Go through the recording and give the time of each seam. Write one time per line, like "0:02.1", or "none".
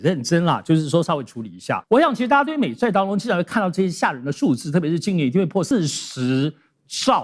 0:01.7
0:05.7